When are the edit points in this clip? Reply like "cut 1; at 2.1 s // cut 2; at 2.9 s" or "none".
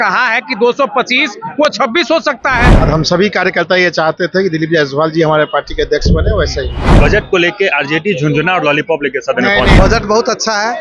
cut 1; at 2.7 s // cut 2; at 6.9 s // cut 3; at 9.7 s